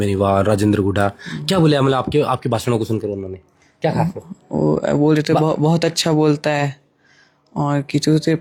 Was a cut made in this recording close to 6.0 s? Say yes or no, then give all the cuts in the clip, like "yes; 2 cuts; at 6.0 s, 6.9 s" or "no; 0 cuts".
no; 0 cuts